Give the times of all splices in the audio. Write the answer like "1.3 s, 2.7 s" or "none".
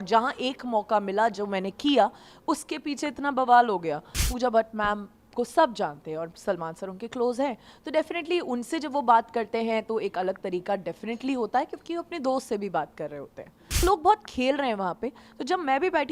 4.3 s, 13.8 s